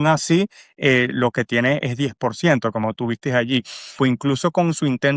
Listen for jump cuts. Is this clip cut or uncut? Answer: cut